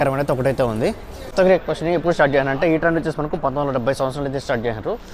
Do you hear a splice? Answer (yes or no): yes